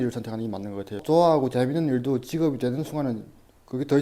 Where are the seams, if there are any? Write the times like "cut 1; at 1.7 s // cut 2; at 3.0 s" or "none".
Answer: cut 1; at 1.0 s